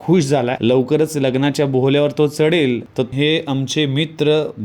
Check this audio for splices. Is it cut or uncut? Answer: cut